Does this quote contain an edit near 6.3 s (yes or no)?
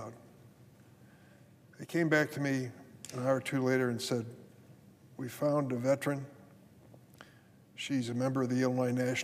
no